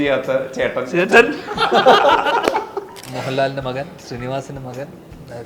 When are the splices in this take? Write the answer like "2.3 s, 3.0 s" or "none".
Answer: 3.0 s